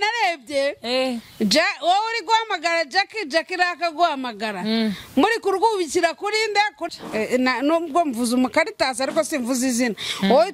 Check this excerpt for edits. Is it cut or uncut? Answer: cut